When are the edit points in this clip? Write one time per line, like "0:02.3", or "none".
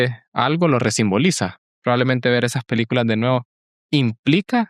0:01.7